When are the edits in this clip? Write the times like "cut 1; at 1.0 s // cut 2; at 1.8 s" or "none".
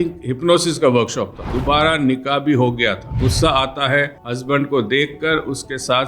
cut 1; at 1.5 s // cut 2; at 3.2 s // cut 3; at 4.2 s